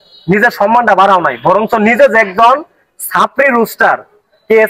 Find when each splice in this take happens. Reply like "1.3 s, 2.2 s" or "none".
none